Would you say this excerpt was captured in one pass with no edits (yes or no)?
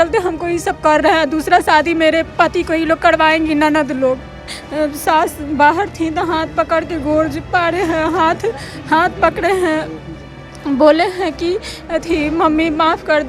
no